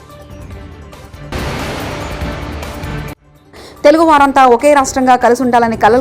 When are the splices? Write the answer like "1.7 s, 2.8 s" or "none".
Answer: 1.0 s, 3.3 s